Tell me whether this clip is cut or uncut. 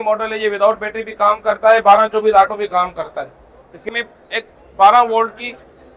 cut